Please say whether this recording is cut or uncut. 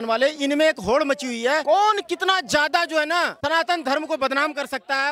uncut